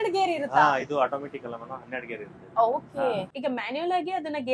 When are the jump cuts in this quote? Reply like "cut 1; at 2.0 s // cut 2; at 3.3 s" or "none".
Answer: cut 1; at 3.3 s